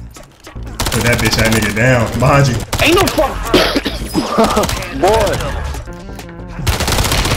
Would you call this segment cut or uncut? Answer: cut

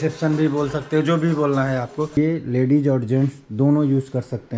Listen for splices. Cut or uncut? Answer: cut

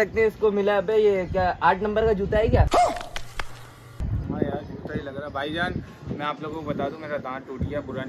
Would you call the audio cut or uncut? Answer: uncut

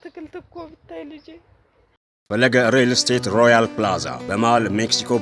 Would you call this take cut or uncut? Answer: cut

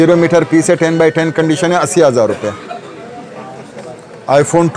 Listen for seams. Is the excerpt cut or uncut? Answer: uncut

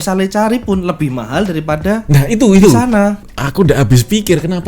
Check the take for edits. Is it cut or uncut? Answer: cut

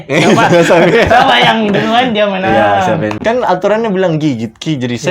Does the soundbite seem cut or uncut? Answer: cut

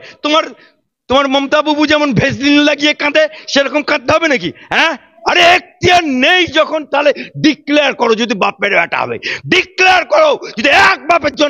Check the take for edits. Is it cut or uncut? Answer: cut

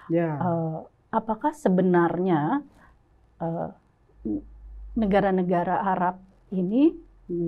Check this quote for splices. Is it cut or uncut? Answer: uncut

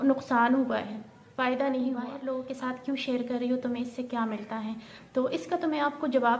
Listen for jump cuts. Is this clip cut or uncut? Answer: cut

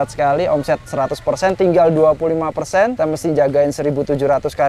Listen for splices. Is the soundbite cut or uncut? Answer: cut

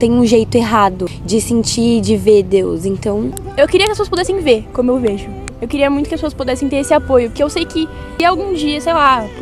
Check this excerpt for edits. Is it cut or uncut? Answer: cut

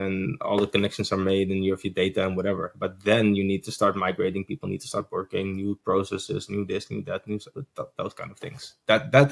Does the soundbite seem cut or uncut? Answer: uncut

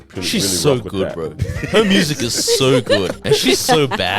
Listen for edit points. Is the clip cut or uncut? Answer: cut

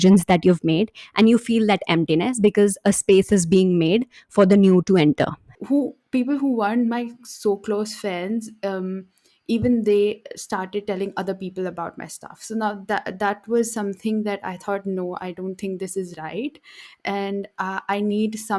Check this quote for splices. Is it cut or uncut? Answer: cut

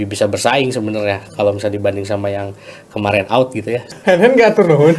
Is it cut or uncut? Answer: cut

